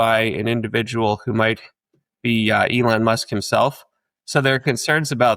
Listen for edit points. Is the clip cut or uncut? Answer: uncut